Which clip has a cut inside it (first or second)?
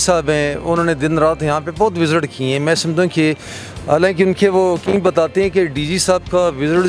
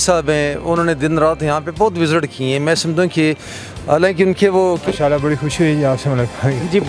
second